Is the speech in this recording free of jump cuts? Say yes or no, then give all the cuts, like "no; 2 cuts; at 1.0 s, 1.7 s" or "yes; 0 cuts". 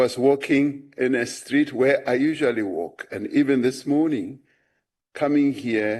yes; 0 cuts